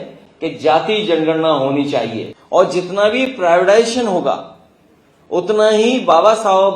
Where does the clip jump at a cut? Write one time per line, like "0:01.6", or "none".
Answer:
0:02.3